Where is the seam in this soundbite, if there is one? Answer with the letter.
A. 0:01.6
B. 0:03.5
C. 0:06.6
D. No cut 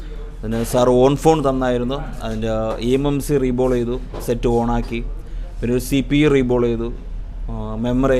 D